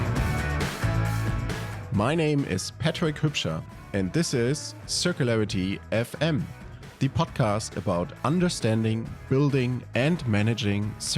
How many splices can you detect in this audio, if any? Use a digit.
1